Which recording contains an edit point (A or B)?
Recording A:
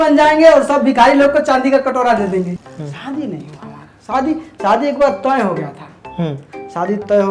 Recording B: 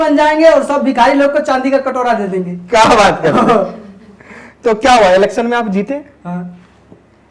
A